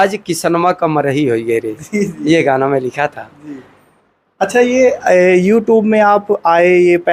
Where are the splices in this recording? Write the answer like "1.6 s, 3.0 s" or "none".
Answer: none